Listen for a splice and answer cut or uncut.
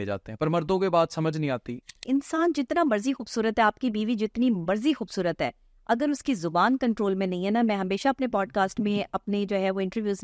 cut